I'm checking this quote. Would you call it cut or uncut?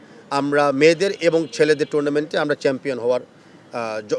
uncut